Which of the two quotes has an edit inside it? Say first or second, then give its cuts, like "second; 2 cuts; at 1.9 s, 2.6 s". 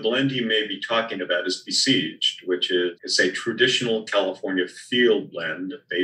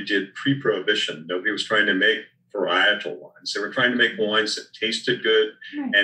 first; 1 cut; at 3.0 s